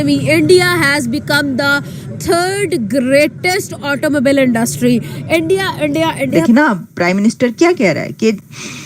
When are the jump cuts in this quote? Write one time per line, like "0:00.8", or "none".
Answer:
0:06.4